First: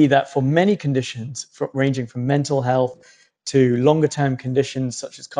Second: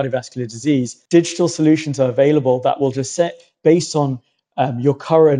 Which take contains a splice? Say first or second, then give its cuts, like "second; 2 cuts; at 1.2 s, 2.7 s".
second; 1 cut; at 1.0 s